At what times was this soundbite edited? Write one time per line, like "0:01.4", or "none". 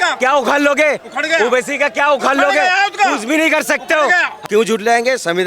0:04.3